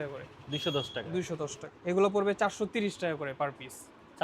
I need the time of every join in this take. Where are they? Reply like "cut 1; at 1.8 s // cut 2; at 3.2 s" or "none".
cut 1; at 1.4 s

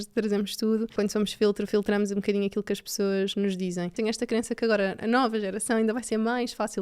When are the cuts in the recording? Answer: cut 1; at 0.9 s // cut 2; at 3.9 s

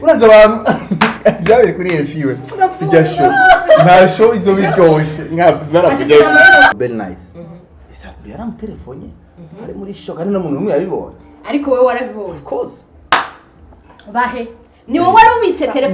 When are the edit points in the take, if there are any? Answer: cut 1; at 6.7 s

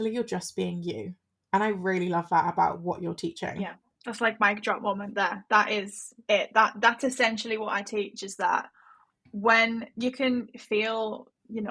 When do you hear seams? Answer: cut 1; at 3.9 s

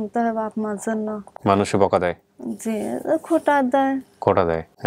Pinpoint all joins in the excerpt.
none

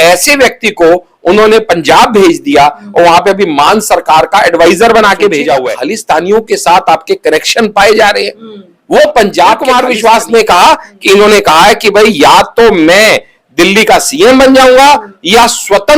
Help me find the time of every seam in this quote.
cut 1; at 5.7 s // cut 2; at 9.6 s

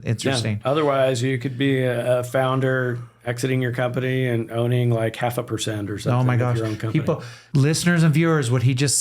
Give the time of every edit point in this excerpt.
cut 1; at 7.3 s

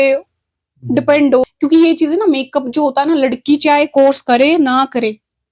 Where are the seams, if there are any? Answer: cut 1; at 1.4 s

